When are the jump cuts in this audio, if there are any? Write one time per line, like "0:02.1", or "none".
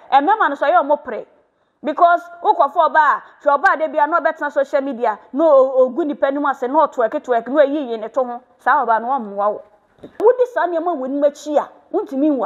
0:10.2